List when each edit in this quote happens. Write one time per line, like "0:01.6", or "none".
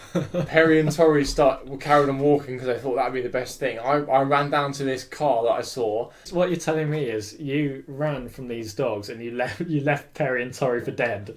0:06.3